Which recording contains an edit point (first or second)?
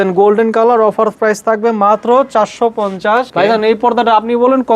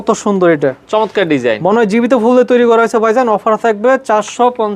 first